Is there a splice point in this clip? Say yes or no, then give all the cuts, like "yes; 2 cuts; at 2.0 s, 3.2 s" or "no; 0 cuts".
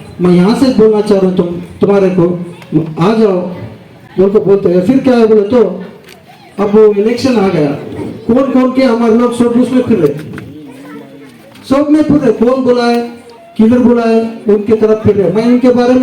no; 0 cuts